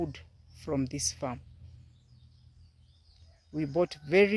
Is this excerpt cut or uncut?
uncut